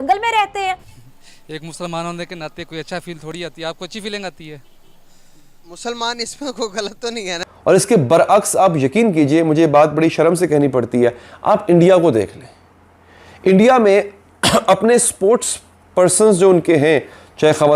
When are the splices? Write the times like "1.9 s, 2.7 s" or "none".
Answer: 0.9 s, 7.5 s